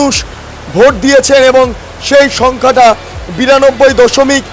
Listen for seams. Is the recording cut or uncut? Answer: uncut